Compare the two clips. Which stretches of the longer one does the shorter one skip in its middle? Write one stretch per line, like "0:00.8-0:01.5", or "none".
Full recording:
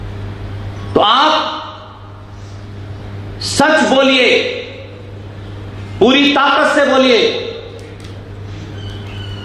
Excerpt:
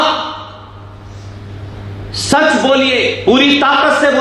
0:04.4-0:05.9